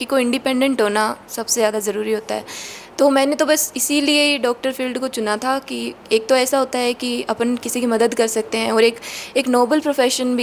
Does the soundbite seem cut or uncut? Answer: uncut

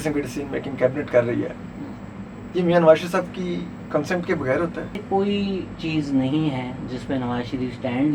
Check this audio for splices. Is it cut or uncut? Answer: cut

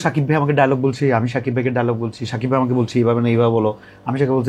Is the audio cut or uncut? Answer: uncut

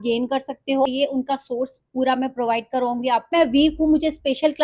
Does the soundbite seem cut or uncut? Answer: cut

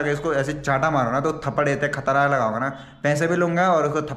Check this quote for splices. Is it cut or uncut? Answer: uncut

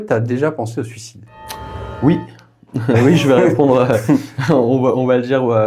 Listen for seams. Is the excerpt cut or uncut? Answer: uncut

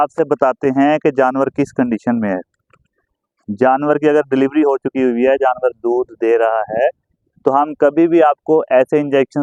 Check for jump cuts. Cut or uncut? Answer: uncut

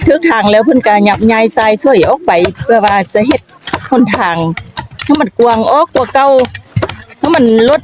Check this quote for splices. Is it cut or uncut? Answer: uncut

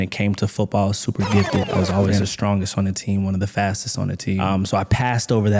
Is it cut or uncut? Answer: cut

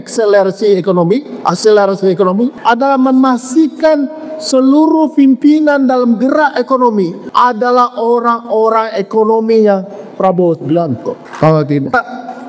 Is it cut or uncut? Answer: cut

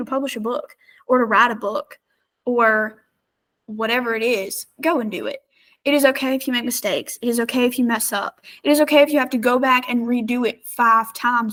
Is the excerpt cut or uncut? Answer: uncut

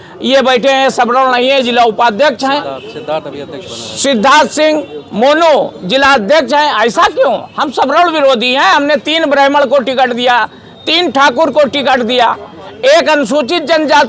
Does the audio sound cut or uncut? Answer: uncut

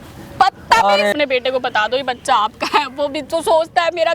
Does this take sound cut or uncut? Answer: cut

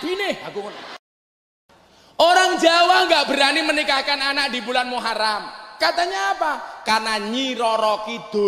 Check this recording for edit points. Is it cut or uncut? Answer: cut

